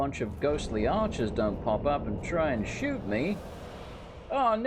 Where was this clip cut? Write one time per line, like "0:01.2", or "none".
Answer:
none